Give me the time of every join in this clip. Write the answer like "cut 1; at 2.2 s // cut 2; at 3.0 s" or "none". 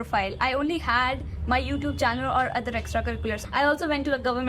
cut 1; at 3.4 s